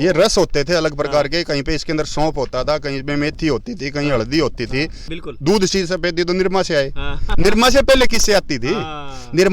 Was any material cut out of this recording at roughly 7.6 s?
no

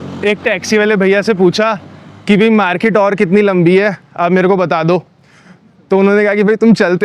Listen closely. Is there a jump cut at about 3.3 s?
no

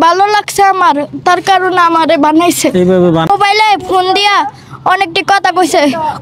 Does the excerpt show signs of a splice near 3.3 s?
yes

